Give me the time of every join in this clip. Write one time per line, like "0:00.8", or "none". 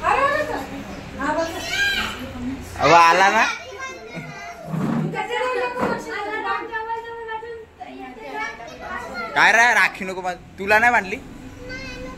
none